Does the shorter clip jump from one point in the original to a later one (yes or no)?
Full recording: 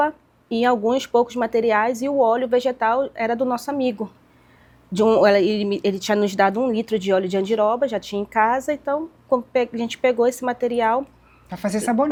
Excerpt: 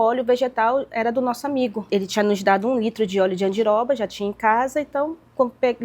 yes